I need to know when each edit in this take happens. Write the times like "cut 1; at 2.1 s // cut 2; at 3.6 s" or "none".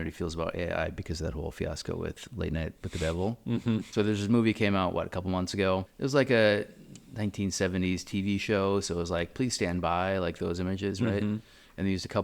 cut 1; at 3.9 s // cut 2; at 5.9 s